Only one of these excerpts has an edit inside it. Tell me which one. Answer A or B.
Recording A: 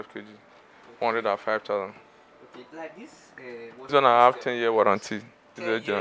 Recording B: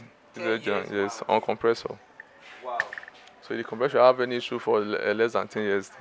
A